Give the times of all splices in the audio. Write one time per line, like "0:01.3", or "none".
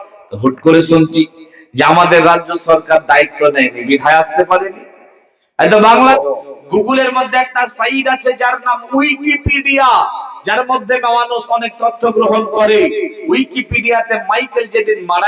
0:06.1

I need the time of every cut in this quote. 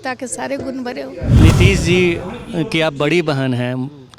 0:01.4

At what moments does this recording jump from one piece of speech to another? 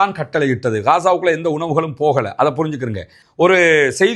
0:03.2

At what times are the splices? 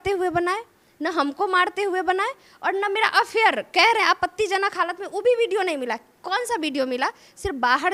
none

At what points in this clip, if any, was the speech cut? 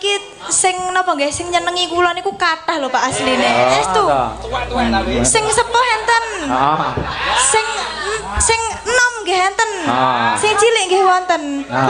0:03.8

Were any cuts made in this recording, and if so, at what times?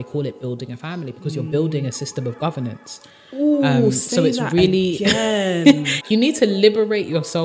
0:06.0

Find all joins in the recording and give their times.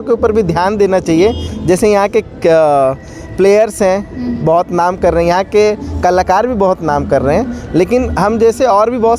none

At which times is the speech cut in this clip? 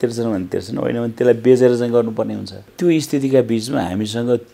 0:02.7

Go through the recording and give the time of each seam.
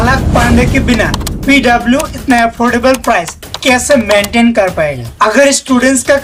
none

